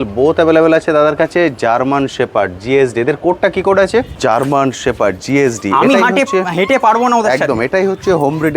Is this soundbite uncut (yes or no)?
no